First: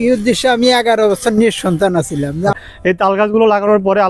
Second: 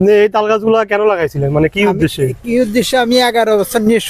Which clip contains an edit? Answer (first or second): first